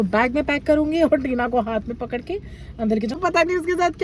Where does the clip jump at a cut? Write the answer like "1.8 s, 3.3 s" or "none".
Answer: 3.1 s

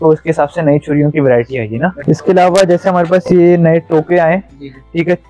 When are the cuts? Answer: none

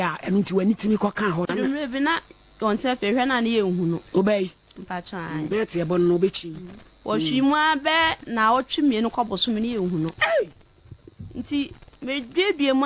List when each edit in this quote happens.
1.5 s

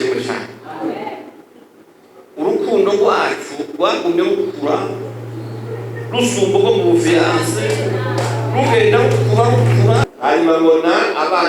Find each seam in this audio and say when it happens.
10.1 s

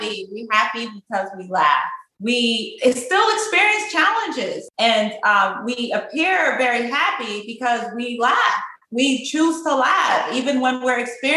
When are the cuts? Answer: 2.0 s, 4.6 s

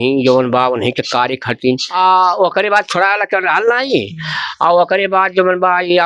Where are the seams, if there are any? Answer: 2.0 s

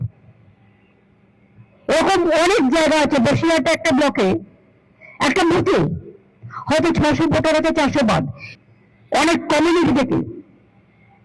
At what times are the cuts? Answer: 8.4 s

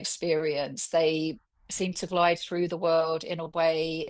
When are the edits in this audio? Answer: none

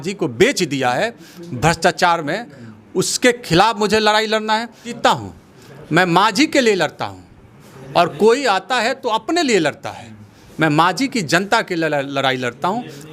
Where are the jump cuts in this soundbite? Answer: 4.9 s

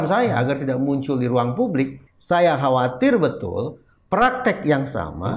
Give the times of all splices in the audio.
2.1 s

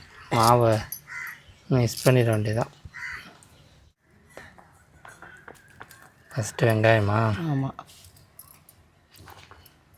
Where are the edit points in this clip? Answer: 3.9 s

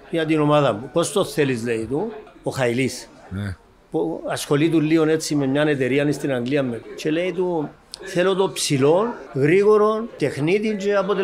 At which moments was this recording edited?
2.3 s, 6.9 s, 9.2 s, 10.2 s

